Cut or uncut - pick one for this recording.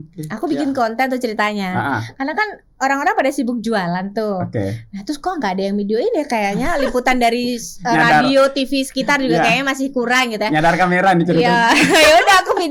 uncut